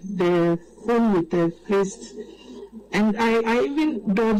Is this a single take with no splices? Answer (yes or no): yes